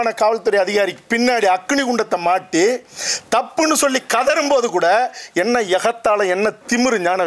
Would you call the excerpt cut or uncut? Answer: uncut